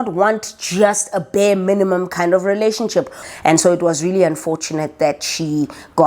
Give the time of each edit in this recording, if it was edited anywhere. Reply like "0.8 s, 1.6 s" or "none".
3.2 s